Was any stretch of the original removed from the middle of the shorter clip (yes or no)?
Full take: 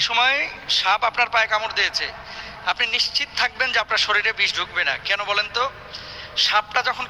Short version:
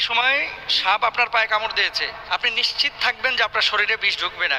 yes